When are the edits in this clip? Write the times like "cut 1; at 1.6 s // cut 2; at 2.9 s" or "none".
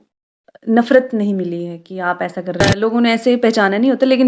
cut 1; at 2.6 s

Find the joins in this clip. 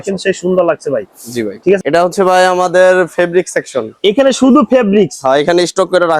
cut 1; at 1.8 s

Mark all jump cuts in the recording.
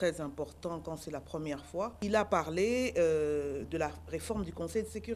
cut 1; at 2.0 s

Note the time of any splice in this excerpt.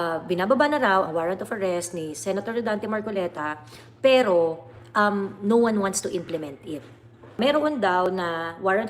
cut 1; at 7.4 s

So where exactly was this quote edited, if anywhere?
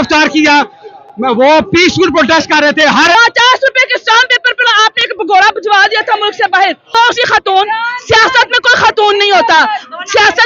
cut 1; at 3.1 s // cut 2; at 6.8 s

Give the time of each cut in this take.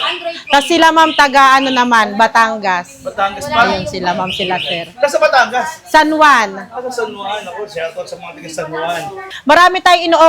cut 1; at 9.3 s

